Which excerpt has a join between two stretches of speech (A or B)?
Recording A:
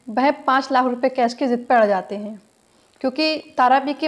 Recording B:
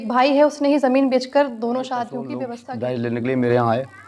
B